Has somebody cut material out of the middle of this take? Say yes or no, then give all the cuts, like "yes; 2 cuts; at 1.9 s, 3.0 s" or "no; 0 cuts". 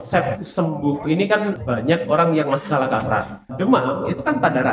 yes; 2 cuts; at 1.6 s, 3.5 s